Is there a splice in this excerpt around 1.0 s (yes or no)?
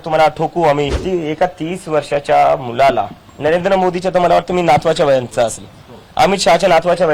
yes